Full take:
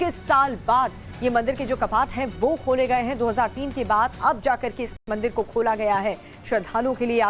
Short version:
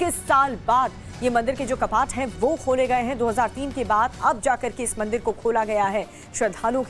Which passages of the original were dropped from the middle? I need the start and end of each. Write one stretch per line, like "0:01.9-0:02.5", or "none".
0:04.9-0:05.0